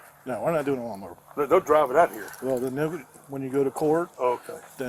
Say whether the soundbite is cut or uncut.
uncut